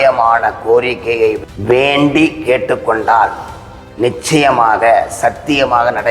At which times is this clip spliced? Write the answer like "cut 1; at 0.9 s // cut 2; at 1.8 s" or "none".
cut 1; at 1.4 s